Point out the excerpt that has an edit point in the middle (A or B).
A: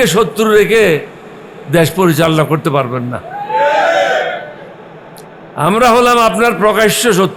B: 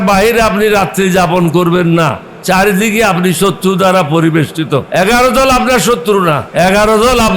B